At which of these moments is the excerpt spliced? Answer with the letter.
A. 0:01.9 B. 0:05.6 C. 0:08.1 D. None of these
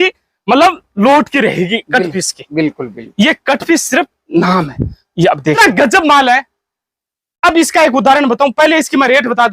B